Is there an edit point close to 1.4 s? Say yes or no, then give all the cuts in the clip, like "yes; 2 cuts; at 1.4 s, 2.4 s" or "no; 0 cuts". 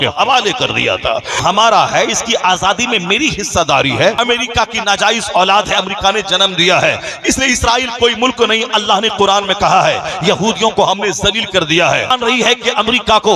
yes; 3 cuts; at 1.4 s, 4.2 s, 12.1 s